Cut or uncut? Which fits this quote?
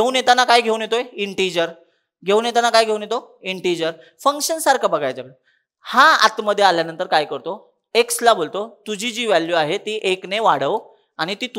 uncut